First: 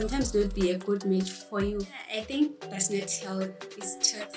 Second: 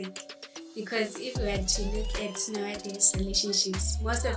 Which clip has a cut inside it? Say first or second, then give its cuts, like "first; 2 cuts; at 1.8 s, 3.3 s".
first; 1 cut; at 2.0 s